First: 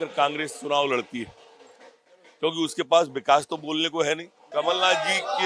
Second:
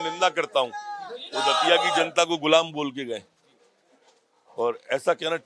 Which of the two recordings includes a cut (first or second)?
first